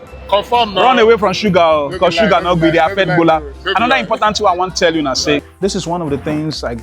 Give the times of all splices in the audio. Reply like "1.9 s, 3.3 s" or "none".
5.5 s